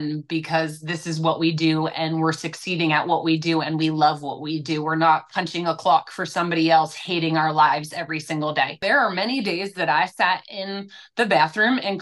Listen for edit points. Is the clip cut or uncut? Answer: cut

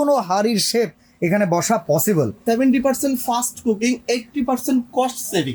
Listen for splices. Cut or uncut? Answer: cut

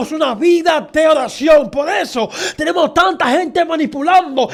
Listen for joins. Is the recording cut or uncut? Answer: uncut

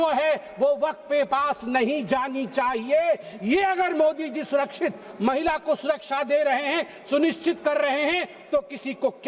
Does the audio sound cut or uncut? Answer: uncut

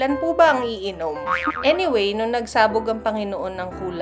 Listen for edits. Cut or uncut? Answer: cut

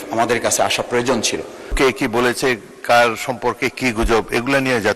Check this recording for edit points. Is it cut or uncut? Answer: cut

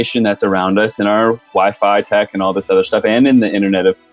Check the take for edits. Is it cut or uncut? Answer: uncut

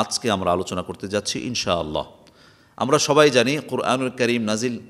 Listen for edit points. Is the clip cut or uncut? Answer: uncut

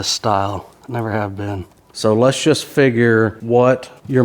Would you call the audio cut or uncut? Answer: cut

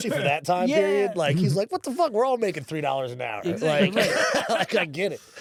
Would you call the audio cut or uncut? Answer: uncut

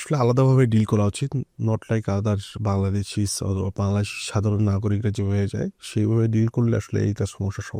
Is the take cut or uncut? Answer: uncut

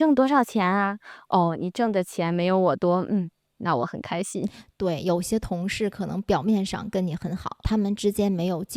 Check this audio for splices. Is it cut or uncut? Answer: cut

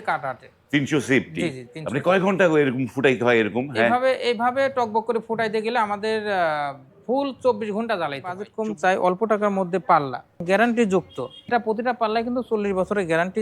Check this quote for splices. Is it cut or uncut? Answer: cut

